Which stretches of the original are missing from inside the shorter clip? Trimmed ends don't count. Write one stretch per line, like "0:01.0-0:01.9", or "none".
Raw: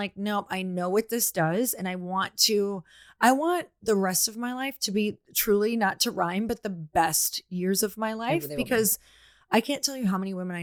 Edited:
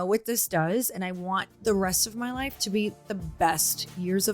0:02.3-0:03.7
0:05.3-0:06.6